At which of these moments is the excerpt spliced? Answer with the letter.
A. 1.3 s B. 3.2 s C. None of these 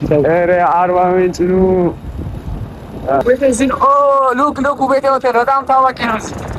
B